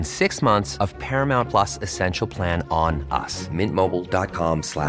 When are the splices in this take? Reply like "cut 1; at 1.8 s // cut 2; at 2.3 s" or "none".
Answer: none

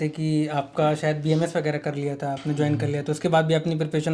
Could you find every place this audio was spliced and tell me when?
none

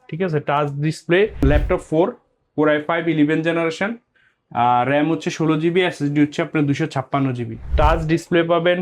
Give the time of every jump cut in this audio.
cut 1; at 1.4 s // cut 2; at 7.6 s

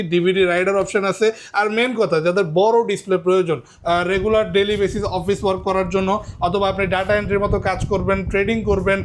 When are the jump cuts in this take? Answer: none

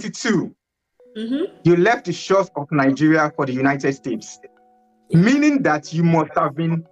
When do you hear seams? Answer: none

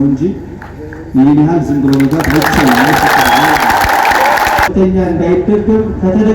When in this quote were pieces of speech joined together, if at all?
cut 1; at 4.7 s

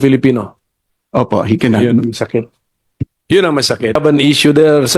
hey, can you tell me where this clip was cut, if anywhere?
cut 1; at 3.9 s

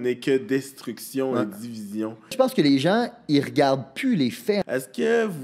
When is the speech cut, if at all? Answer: cut 1; at 2.3 s // cut 2; at 4.6 s

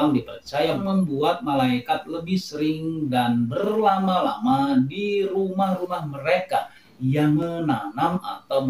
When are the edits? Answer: cut 1; at 7.4 s

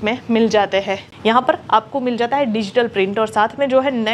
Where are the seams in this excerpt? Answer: cut 1; at 1.1 s

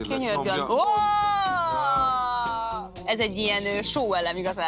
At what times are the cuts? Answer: cut 1; at 3.0 s

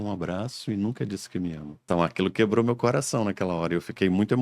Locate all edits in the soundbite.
cut 1; at 1.7 s

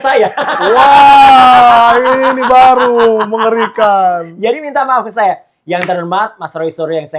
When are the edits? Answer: none

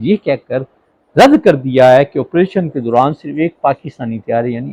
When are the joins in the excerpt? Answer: none

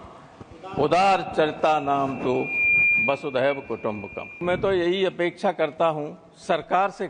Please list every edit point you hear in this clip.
cut 1; at 4.4 s

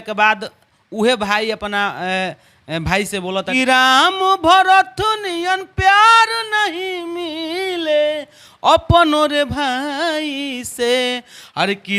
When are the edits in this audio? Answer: cut 1; at 3.5 s

